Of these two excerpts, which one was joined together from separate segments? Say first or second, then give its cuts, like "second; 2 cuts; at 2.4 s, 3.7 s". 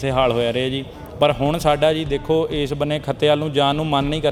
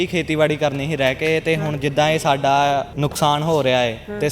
second; 1 cut; at 2.9 s